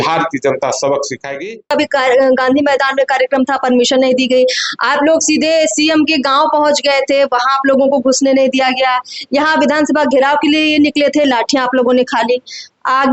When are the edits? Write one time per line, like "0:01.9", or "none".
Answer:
0:01.7